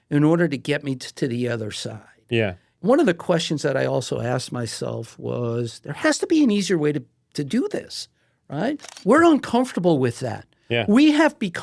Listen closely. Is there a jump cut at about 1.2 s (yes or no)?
no